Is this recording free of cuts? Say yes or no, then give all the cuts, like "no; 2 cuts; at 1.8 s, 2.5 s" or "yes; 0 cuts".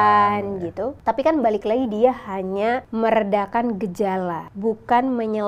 no; 3 cuts; at 1.0 s, 2.9 s, 4.5 s